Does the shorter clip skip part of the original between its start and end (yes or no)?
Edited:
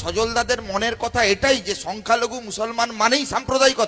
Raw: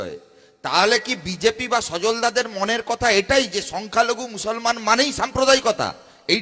no